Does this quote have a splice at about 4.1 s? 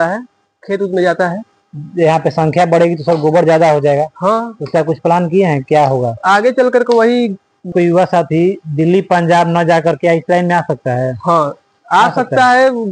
no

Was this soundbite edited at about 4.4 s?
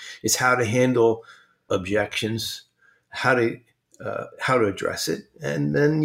no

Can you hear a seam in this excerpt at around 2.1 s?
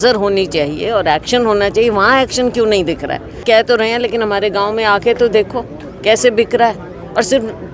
no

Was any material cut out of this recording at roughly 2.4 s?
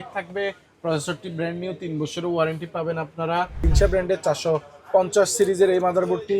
no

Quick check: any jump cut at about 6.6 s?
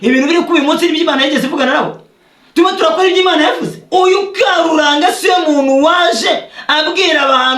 no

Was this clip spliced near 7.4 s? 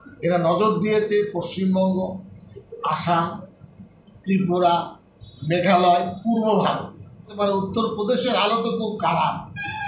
yes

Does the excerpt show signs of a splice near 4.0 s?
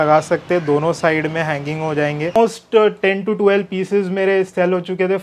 no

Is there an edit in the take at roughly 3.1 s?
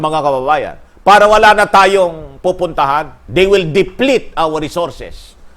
yes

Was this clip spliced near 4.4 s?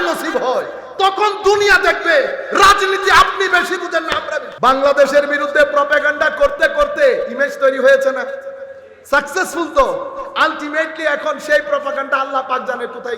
yes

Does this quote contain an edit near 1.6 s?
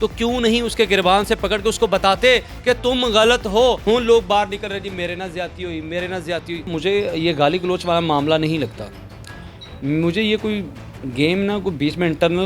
no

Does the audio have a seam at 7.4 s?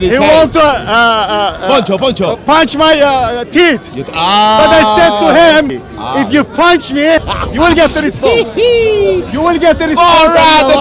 yes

